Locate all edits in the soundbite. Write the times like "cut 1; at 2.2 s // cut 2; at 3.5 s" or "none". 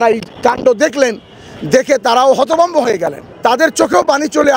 cut 1; at 3.3 s